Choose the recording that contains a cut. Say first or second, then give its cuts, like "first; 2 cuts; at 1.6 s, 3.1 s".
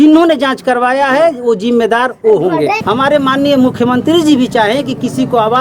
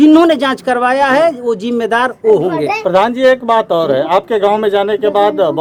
first; 1 cut; at 2.8 s